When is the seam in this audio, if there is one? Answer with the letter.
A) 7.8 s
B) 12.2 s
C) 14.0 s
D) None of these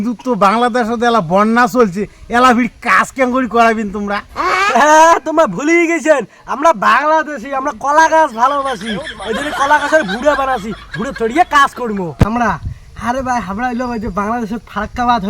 B